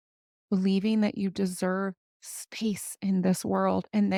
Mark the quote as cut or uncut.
uncut